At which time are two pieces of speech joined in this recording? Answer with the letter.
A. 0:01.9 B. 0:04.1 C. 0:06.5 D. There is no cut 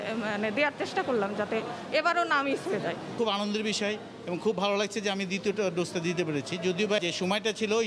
D